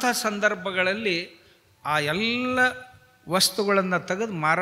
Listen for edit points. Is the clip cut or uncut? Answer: uncut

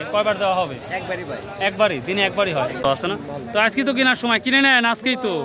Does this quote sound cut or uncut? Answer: cut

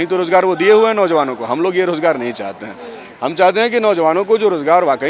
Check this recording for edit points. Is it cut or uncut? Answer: uncut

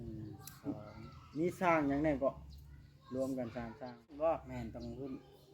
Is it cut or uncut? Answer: cut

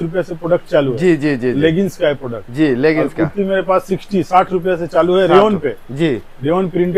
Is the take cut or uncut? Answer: uncut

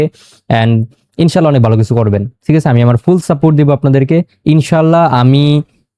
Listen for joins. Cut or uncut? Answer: uncut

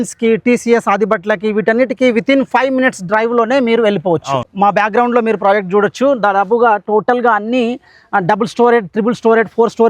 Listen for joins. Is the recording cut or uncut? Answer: cut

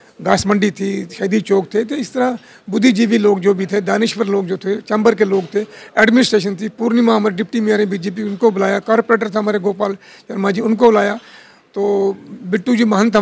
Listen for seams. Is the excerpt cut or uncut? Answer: uncut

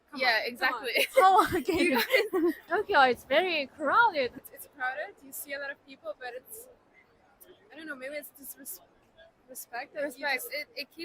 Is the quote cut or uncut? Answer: cut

